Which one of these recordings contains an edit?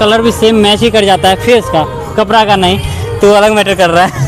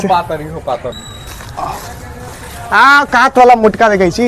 second; 1 cut; at 0.9 s

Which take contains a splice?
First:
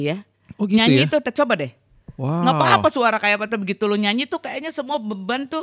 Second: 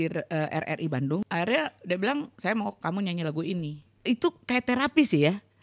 second; 2 cuts; at 1.2 s, 3.8 s

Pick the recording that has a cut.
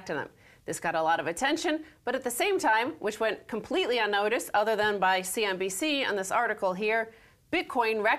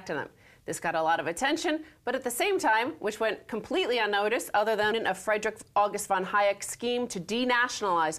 first; 1 cut; at 4.9 s

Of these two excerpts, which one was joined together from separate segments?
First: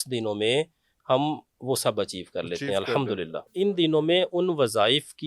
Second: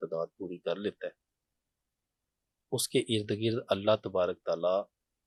first; 1 cut; at 3.5 s

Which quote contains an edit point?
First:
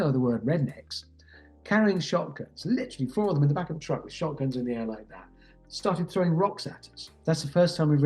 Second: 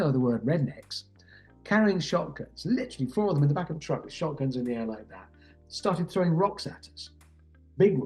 first; 1 cut; at 7.1 s

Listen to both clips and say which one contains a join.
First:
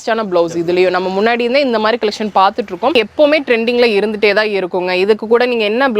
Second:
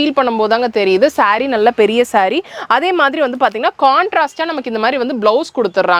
first; 1 cut; at 2.9 s

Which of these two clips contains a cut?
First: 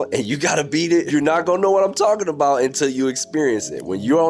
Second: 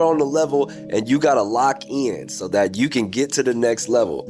first; 1 cut; at 1.1 s

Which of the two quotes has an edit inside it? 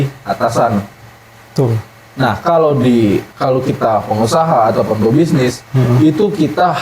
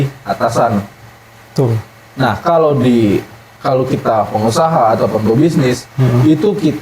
first; 1 cut; at 3.3 s

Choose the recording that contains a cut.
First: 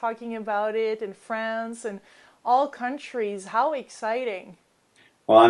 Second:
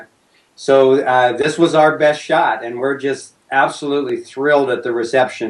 second; 1 cut; at 4.2 s

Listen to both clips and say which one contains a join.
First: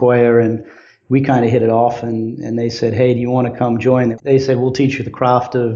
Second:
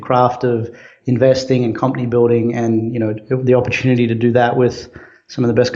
first; 1 cut; at 4.1 s

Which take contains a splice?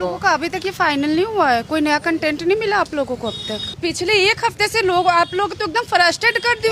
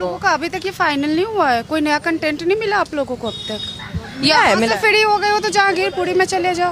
first; 1 cut; at 3.7 s

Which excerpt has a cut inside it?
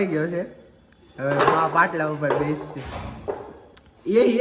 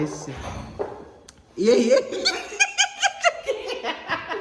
second; 1 cut; at 3.4 s

